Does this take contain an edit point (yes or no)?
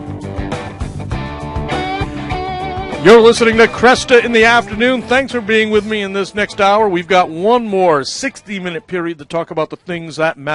no